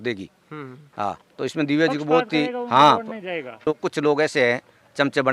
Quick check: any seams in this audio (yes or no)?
yes